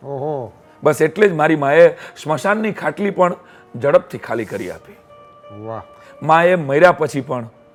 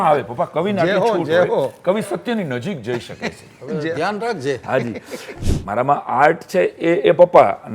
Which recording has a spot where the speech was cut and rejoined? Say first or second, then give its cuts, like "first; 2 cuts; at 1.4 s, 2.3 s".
second; 1 cut; at 5.3 s